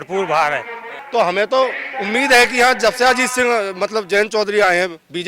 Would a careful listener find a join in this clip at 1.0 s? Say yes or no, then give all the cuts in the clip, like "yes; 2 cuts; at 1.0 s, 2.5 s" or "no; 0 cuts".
yes; 1 cut; at 1.0 s